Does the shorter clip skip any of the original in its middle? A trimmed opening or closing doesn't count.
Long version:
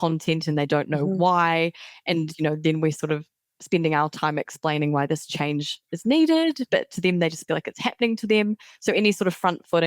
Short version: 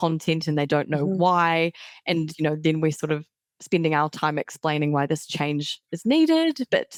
no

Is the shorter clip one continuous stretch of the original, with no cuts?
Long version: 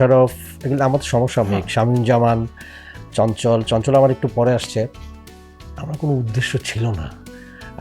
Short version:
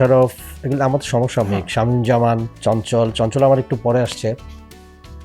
no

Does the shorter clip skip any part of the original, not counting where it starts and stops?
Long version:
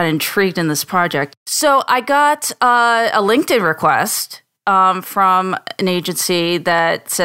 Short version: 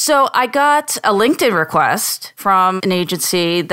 yes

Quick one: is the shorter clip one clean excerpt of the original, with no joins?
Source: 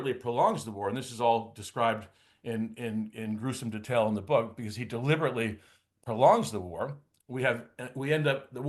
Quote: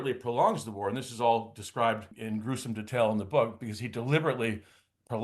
no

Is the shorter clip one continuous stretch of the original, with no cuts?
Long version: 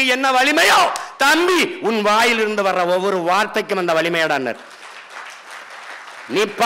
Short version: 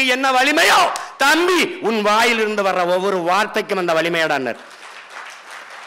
yes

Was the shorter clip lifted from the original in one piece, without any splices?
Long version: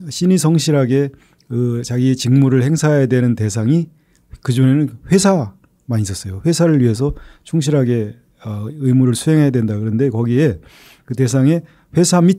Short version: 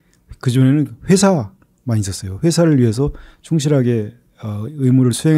yes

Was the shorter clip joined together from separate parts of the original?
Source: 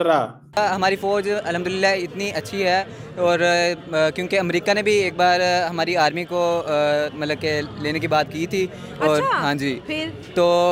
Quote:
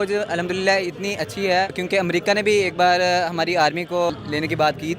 yes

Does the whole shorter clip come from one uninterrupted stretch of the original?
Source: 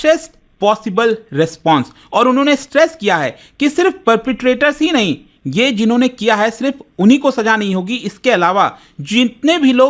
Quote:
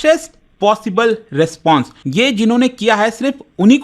no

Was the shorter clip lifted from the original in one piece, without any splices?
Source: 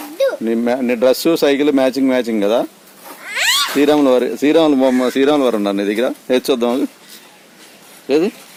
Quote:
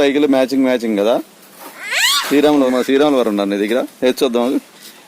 no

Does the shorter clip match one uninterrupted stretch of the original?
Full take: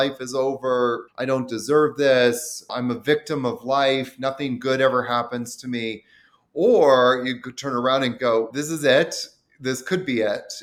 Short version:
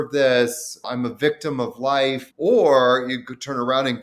no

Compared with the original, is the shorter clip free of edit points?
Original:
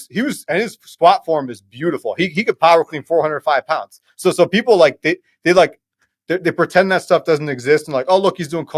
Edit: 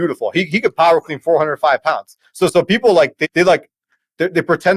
no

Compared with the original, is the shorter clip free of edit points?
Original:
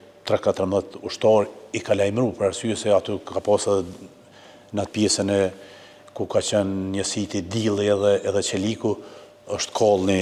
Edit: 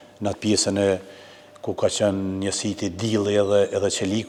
yes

